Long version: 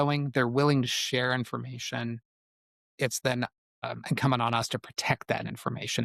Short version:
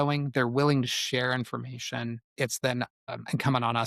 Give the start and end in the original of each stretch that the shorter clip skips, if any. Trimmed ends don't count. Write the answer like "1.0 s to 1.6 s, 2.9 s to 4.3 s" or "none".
2.2 s to 2.9 s, 3.6 s to 3.8 s